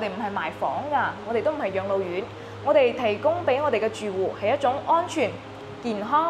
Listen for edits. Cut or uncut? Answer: uncut